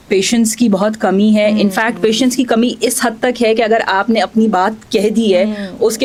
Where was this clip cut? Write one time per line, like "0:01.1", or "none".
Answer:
none